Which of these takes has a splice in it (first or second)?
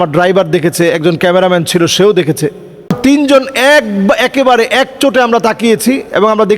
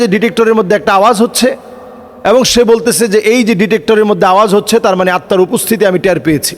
first